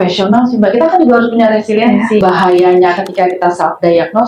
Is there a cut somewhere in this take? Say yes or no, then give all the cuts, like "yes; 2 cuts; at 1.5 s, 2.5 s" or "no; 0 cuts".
yes; 1 cut; at 2.2 s